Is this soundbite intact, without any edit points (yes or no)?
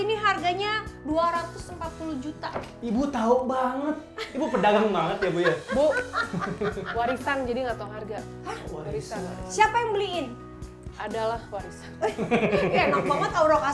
yes